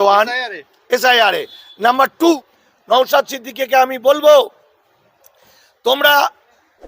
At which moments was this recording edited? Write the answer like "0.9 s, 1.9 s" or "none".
2.4 s